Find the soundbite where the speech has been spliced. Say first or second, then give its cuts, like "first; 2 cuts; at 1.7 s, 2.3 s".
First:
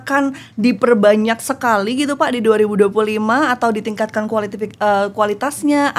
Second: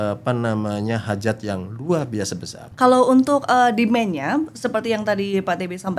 second; 1 cut; at 2.7 s